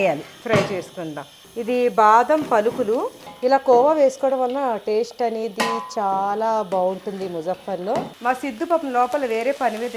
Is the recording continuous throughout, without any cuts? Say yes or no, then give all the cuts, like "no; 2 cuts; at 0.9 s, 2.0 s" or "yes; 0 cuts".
no; 3 cuts; at 1.5 s, 3.2 s, 8.1 s